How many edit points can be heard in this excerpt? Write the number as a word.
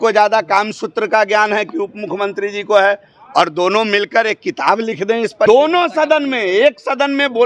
one